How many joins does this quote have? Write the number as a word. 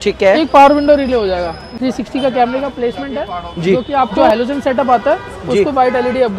two